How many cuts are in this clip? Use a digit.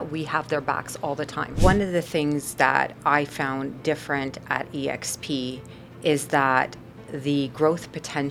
1